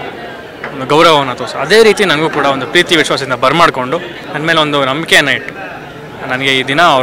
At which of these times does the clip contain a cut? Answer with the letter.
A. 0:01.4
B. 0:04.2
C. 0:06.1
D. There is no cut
B